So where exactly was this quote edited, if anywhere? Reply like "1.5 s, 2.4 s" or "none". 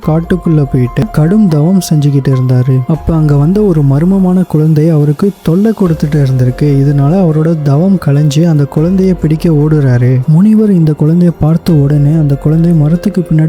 1.0 s, 10.2 s